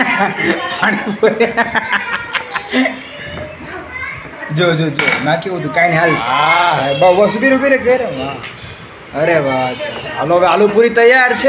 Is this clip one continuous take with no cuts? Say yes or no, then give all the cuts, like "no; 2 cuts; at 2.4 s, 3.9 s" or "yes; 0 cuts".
no; 1 cut; at 6.2 s